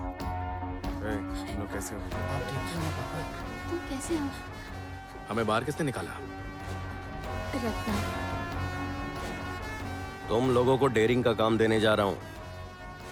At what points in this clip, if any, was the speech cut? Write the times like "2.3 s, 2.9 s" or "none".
none

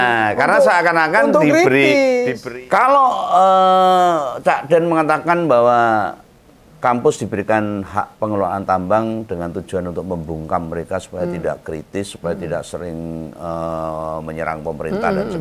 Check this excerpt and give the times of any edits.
2.4 s

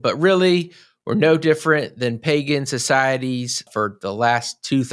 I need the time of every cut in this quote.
3.7 s

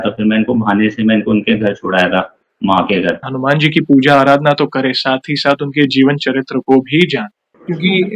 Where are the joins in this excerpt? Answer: 3.3 s

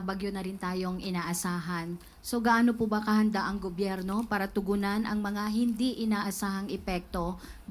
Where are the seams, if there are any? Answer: none

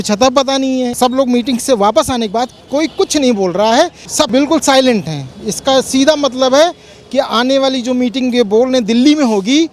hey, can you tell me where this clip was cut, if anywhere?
0.9 s, 4.1 s

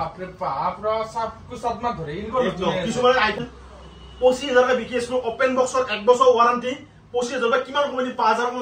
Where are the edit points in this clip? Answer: 3.4 s

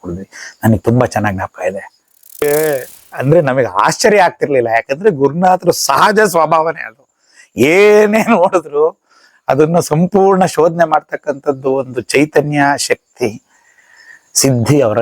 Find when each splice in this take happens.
2.4 s

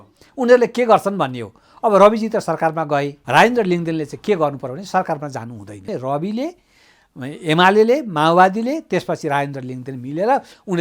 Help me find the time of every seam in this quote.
3.2 s, 5.9 s

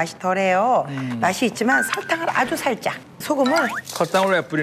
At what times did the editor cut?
3.1 s

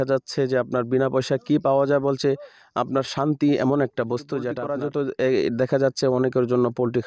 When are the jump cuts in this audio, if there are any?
4.6 s

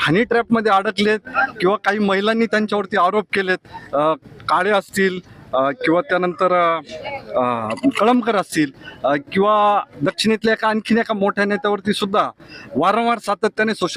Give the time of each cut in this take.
none

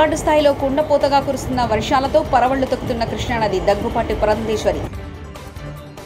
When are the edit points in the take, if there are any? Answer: none

